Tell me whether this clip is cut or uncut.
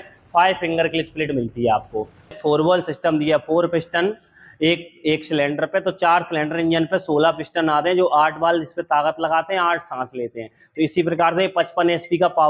cut